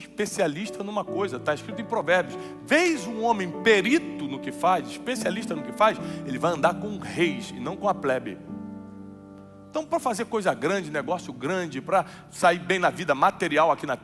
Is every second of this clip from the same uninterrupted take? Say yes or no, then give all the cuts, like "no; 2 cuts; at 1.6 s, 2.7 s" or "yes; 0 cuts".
yes; 0 cuts